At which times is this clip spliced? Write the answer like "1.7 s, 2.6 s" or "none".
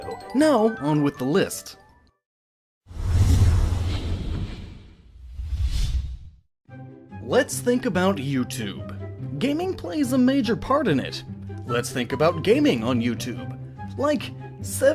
none